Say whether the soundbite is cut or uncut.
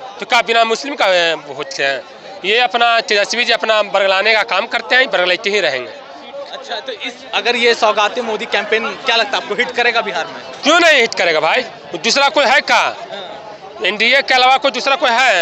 uncut